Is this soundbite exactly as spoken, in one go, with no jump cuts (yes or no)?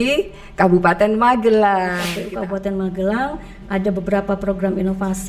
no